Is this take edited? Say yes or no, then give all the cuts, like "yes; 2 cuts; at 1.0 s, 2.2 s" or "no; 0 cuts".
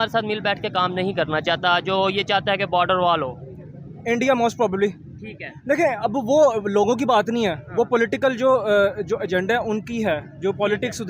no; 0 cuts